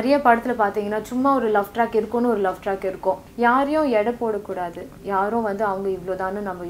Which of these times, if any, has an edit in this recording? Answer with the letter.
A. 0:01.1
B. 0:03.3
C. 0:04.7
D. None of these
B